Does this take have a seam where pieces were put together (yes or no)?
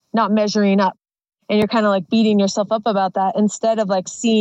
yes